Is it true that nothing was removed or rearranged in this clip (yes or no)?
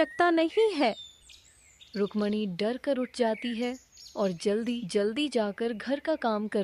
yes